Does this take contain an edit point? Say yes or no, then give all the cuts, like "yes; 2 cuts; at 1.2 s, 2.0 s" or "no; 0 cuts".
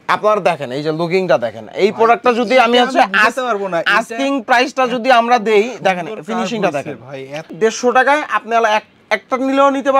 yes; 1 cut; at 7.5 s